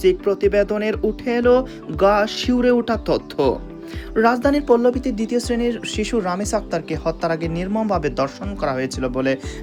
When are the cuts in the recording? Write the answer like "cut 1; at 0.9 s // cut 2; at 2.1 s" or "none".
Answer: none